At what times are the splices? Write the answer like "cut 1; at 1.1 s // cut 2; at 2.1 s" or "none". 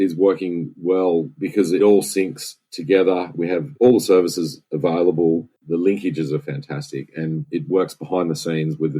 cut 1; at 5.5 s